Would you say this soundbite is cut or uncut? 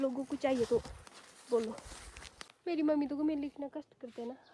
cut